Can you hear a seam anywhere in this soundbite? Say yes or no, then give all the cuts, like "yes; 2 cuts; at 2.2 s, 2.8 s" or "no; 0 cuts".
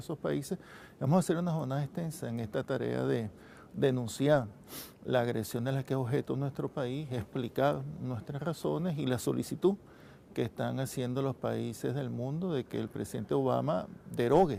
no; 0 cuts